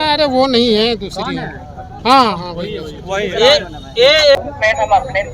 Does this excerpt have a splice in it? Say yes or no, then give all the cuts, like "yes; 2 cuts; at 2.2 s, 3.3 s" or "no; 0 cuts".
yes; 1 cut; at 4.4 s